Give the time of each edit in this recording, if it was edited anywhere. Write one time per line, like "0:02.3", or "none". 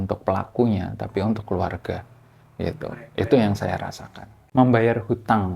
0:04.4